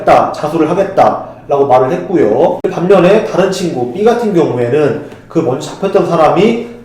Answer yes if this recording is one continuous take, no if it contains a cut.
yes